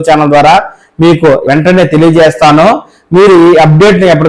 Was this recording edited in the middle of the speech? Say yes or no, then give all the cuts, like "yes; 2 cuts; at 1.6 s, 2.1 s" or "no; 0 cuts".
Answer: yes; 1 cut; at 1.4 s